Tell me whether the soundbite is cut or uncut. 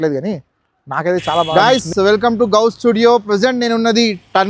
cut